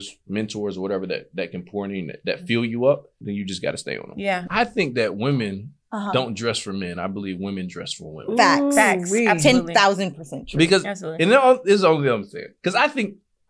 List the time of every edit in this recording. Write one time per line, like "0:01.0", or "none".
0:03.3
0:04.5